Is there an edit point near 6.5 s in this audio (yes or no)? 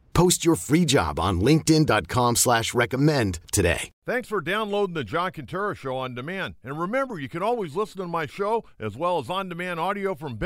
no